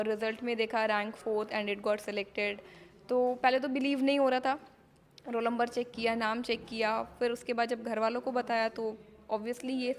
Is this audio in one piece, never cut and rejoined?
yes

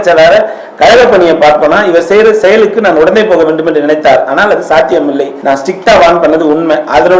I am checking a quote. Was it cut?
no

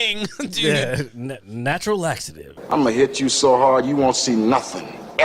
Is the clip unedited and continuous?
no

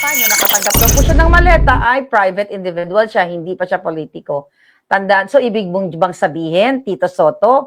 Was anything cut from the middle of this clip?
no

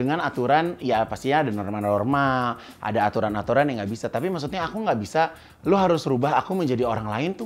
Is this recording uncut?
yes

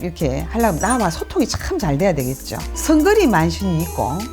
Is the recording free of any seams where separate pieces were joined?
no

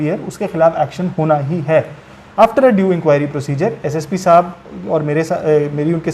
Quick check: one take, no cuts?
yes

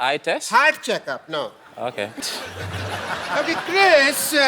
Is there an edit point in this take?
yes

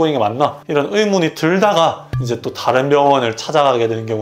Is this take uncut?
yes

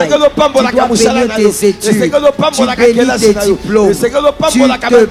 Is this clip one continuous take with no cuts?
yes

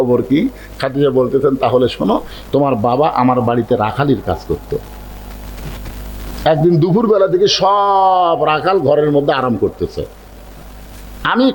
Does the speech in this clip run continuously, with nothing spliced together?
yes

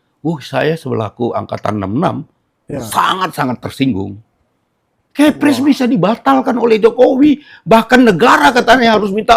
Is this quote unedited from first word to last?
yes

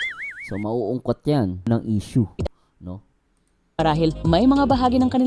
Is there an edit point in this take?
yes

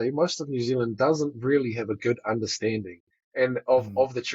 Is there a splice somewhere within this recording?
no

